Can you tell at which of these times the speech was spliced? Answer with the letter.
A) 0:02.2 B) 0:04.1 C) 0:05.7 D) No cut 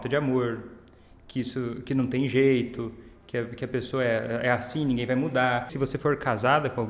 C